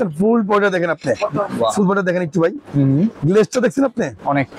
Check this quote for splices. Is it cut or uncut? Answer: uncut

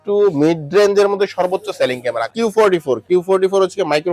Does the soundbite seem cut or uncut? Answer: cut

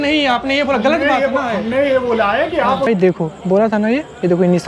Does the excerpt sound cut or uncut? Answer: cut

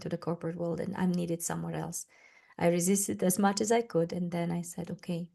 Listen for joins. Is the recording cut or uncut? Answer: uncut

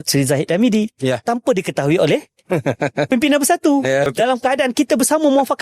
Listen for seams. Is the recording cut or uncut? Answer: cut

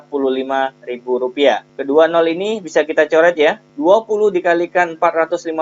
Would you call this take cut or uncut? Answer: cut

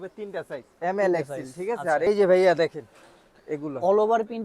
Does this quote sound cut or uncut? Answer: cut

